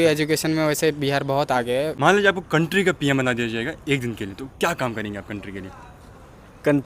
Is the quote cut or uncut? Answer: cut